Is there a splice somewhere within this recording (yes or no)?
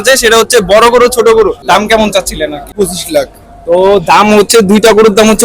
yes